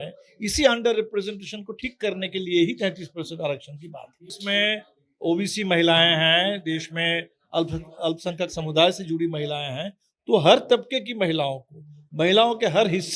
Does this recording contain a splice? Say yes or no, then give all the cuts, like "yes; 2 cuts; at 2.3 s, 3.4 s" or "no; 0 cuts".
yes; 1 cut; at 4.4 s